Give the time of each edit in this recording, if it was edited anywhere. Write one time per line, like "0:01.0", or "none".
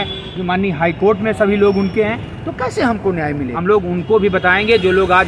0:03.5